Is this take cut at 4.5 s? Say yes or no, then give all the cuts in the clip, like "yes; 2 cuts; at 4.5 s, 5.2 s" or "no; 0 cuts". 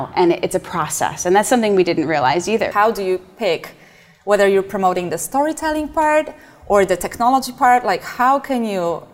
no; 1 cut; at 2.7 s